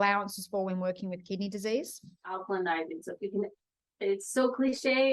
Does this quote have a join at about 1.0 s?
no; 1 cut; at 2.4 s

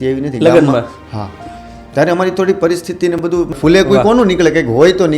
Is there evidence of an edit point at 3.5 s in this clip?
yes; 1 cut; at 3.5 s

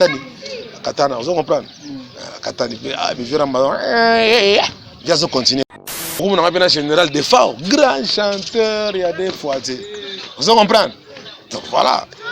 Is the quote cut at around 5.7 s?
yes; 1 cut; at 5.7 s

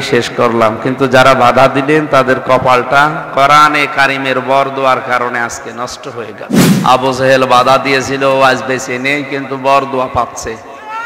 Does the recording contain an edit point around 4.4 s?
no; 1 cut; at 6.6 s

